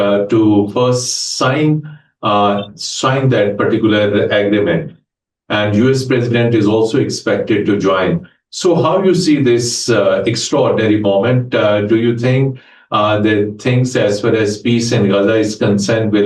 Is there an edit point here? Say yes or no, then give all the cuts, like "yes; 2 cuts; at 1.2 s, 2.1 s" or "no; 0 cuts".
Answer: no; 0 cuts